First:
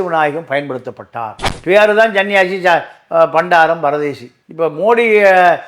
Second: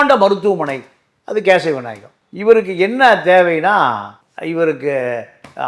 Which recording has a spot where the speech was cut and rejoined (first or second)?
first